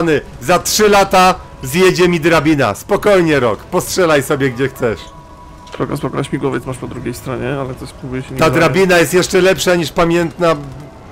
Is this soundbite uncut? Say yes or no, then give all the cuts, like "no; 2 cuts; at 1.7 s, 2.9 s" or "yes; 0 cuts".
yes; 0 cuts